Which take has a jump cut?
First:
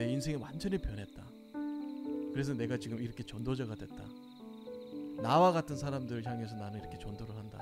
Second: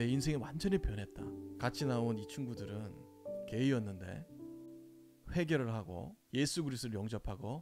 second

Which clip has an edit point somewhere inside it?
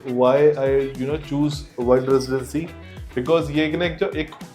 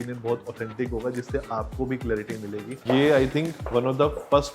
second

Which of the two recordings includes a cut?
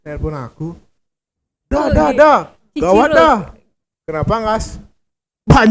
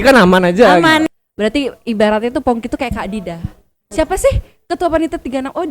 second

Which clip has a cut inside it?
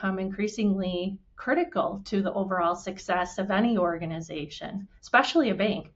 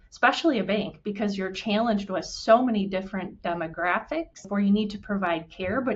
second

